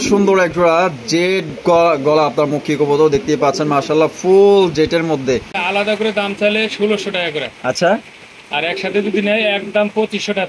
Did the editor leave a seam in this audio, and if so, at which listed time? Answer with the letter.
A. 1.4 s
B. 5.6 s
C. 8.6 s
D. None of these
B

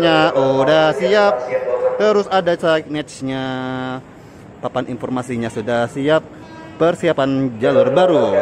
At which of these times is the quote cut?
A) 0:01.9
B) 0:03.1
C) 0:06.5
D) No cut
D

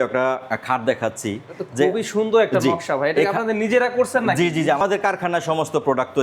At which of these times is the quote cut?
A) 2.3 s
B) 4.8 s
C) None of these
B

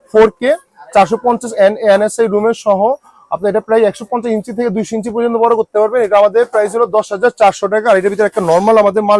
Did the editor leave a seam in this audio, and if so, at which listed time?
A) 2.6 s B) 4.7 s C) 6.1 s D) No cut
D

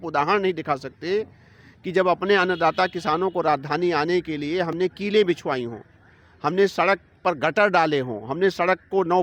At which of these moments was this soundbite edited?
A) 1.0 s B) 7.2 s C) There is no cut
C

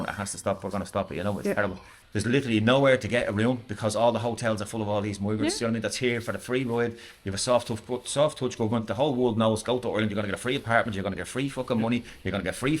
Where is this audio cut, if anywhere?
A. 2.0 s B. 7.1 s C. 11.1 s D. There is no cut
A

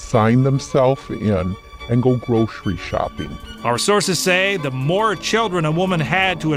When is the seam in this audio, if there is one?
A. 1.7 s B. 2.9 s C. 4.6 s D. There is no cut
D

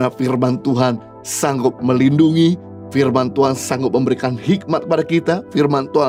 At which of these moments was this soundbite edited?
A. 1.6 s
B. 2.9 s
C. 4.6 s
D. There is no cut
D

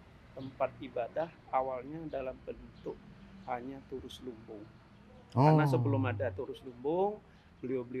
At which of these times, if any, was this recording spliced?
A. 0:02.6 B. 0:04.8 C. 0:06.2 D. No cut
D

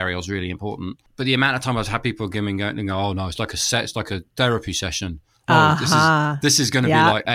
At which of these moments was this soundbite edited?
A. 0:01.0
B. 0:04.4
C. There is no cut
A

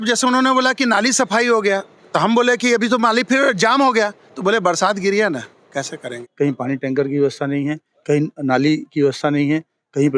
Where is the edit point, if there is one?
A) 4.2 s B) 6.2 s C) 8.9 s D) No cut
B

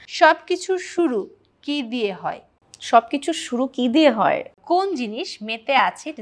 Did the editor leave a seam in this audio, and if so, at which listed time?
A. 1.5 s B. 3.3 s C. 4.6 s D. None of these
C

